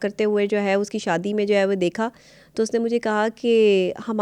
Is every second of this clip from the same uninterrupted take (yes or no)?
yes